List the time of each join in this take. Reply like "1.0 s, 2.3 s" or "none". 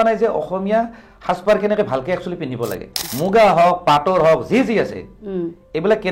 3.0 s